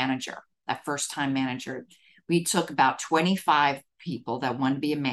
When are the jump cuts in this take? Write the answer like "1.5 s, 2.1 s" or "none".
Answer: none